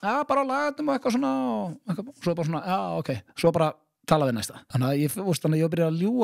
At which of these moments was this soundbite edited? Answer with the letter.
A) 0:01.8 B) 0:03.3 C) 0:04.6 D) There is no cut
C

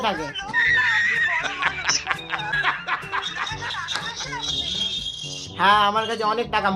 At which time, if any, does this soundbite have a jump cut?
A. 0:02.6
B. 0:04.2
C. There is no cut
A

